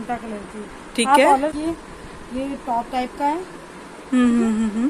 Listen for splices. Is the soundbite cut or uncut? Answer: cut